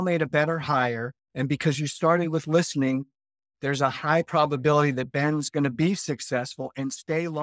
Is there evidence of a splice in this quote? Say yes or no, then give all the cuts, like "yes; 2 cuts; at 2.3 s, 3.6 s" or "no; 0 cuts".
no; 0 cuts